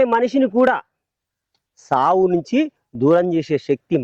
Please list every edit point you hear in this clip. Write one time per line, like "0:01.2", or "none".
none